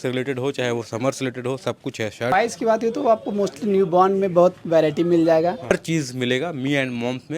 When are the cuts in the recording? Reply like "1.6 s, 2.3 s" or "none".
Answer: 2.3 s, 5.7 s